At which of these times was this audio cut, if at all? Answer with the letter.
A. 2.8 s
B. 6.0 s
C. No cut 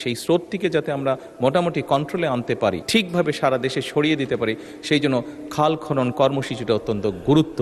A